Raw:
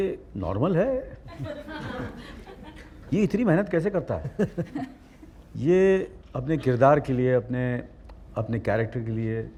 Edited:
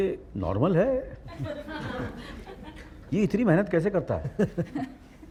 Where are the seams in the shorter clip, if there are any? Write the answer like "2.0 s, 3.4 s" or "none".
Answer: none